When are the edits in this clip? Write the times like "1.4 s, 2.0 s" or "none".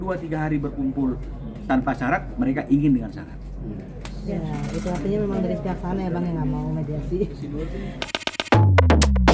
8.1 s